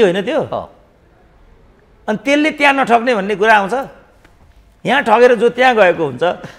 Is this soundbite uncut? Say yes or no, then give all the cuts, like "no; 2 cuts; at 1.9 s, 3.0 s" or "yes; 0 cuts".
yes; 0 cuts